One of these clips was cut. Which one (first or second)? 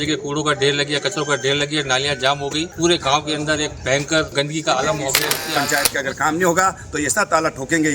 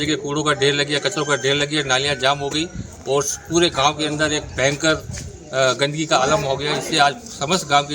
first